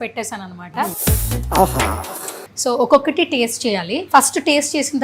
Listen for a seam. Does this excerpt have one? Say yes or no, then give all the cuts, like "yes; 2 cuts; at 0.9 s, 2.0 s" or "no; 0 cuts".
yes; 3 cuts; at 1.0 s, 2.4 s, 3.9 s